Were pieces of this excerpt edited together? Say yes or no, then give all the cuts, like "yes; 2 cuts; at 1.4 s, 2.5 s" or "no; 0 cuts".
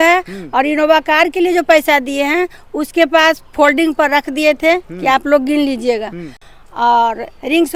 no; 0 cuts